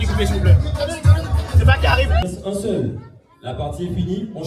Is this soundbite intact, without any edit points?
no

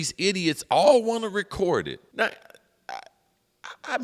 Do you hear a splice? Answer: yes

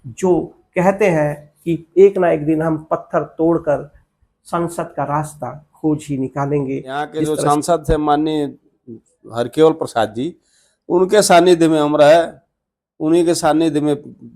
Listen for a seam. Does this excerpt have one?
yes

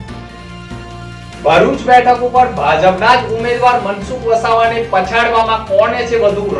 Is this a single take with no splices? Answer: yes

